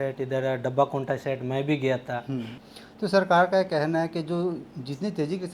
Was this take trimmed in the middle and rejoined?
yes; 1 cut; at 2.6 s

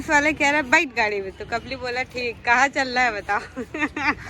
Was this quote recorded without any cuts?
yes; 0 cuts

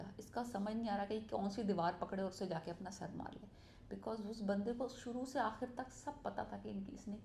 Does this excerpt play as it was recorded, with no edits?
yes; 0 cuts

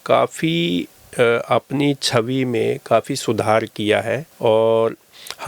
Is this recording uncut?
yes; 0 cuts

